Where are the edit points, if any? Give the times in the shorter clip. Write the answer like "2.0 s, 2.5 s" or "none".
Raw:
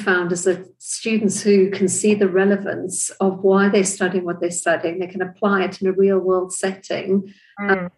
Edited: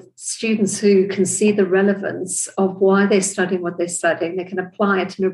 none